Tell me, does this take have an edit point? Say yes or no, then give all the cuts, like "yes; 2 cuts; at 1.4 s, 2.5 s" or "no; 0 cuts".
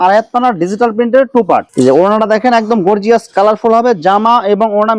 yes; 1 cut; at 1.7 s